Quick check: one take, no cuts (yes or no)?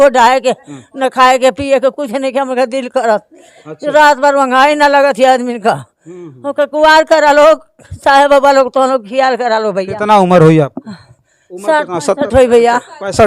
yes